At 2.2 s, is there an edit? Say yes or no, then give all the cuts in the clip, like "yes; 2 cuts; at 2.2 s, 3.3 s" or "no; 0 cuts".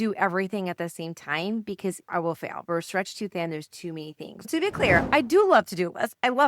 no; 1 cut; at 4.5 s